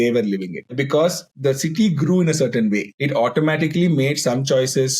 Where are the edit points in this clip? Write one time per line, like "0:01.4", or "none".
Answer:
0:00.7
0:01.3
0:02.9